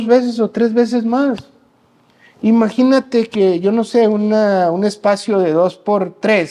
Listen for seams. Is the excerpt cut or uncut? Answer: uncut